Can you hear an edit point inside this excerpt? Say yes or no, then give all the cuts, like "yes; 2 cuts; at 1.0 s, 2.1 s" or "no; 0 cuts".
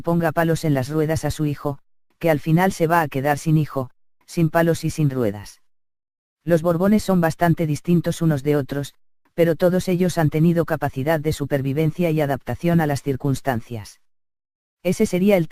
no; 0 cuts